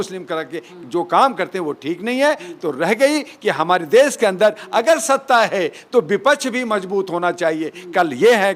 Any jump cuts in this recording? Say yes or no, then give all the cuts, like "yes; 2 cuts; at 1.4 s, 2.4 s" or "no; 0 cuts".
no; 0 cuts